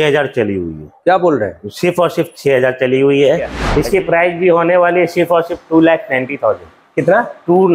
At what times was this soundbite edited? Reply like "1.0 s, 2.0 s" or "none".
3.6 s